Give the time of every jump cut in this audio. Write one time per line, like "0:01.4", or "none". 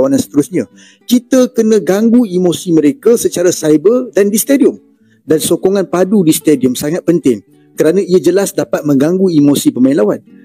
0:05.1